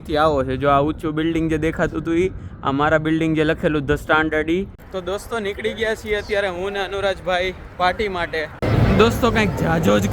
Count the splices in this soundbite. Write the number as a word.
two